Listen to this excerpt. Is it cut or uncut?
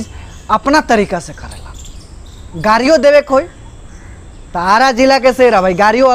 uncut